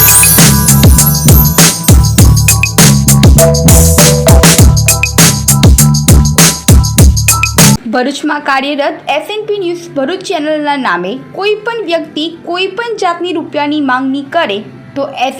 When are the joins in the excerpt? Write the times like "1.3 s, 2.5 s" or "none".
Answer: 7.8 s